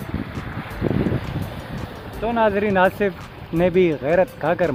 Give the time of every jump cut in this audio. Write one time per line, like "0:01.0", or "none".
none